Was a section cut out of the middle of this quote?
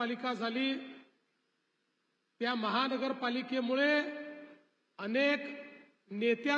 no; 0 cuts

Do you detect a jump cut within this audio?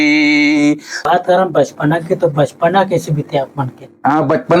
yes; 1 cut; at 0.9 s

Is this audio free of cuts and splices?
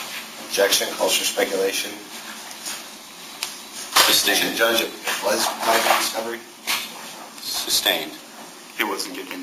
yes; 0 cuts

